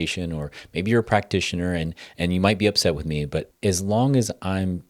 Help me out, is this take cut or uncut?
cut